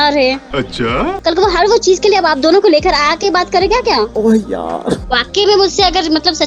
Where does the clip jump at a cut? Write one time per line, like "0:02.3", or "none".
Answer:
0:01.1
0:05.0